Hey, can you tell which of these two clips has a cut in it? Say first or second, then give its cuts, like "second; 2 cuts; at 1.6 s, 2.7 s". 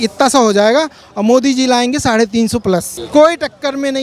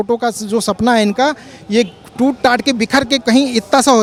first; 1 cut; at 3.0 s